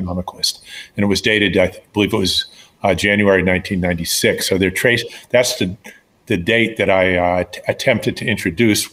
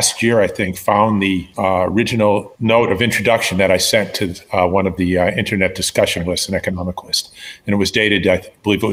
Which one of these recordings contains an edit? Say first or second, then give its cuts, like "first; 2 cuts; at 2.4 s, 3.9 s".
second; 2 cuts; at 1.5 s, 2.5 s